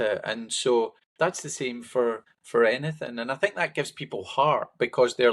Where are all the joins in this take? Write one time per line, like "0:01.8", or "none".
0:01.0
0:02.3